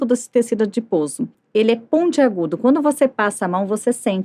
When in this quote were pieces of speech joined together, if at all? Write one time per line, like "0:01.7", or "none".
0:01.3